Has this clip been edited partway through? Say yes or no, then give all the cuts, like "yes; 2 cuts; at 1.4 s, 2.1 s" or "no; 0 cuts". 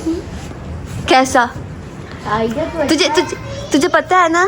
no; 0 cuts